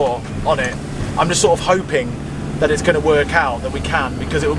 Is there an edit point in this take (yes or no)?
no